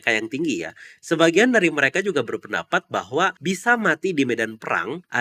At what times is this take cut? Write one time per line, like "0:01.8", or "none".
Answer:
none